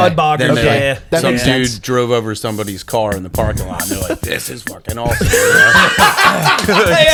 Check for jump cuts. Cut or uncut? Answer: uncut